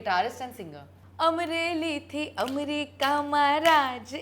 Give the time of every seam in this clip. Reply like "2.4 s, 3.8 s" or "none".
1.1 s